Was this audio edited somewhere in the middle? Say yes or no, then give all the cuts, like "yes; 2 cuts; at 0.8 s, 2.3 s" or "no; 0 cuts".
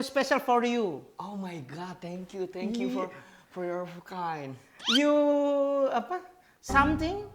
no; 0 cuts